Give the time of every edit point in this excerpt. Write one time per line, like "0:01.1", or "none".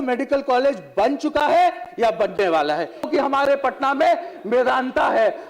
0:03.1